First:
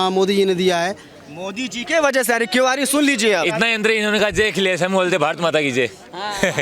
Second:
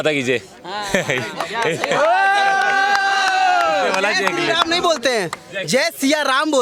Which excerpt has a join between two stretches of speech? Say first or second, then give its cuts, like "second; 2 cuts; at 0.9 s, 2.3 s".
first; 1 cut; at 3.4 s